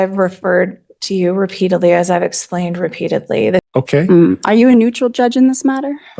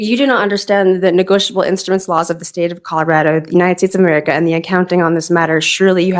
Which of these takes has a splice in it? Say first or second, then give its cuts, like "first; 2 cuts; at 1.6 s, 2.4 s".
first; 1 cut; at 3.7 s